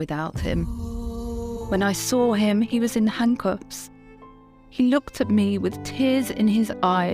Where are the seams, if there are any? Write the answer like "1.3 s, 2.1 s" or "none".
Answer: 1.6 s